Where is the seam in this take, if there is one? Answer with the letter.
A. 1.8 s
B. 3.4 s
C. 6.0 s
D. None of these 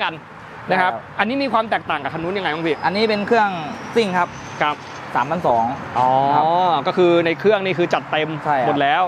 D